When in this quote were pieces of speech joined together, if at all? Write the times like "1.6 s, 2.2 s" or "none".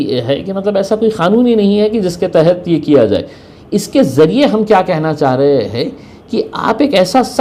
none